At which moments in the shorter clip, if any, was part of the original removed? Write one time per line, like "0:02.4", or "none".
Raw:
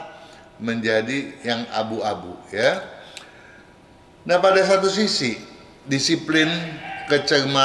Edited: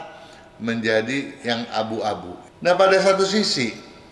0:02.4